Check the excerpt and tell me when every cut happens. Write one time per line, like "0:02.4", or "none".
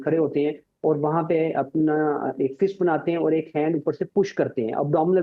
none

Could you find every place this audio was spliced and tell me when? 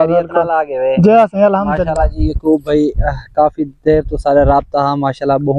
none

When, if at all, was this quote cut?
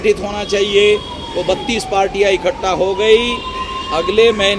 none

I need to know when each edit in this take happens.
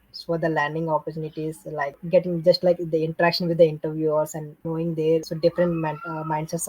0:02.0
0:04.5
0:05.3

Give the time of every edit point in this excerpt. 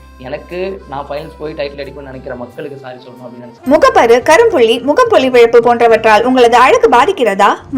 0:03.5

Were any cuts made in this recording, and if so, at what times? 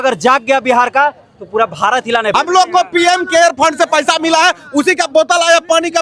0:02.3

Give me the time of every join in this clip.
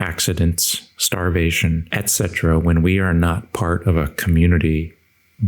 0:01.9

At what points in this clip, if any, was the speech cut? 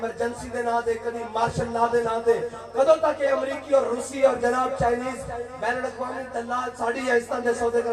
none

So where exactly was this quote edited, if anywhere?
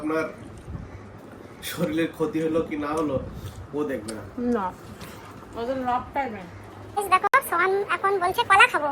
0:06.8

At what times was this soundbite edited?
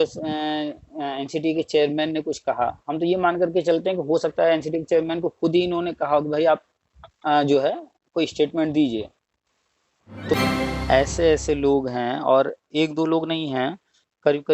0:10.3

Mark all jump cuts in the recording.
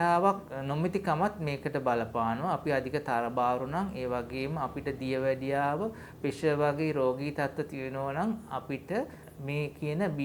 0:09.2

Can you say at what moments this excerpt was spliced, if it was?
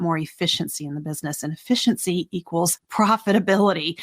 0:02.8

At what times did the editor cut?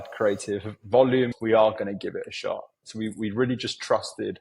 0:01.4

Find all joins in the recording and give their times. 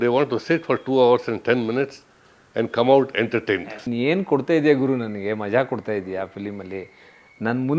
0:03.8

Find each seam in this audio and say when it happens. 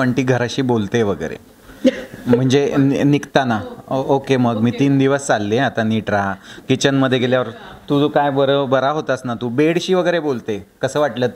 none

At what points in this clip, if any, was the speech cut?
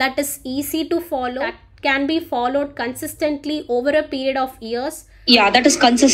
0:01.6
0:05.1

